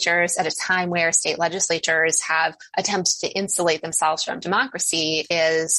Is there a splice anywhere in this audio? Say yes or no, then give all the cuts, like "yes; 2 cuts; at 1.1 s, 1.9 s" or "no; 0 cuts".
no; 0 cuts